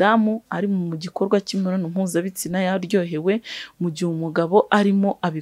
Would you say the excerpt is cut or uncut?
uncut